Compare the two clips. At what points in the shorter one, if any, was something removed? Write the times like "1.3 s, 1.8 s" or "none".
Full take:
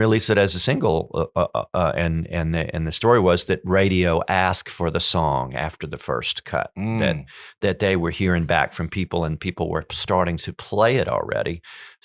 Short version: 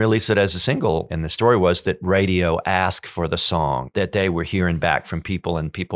1.1 s, 3.9 s